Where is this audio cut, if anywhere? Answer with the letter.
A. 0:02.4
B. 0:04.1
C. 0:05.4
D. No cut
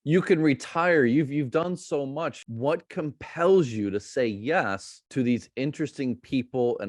A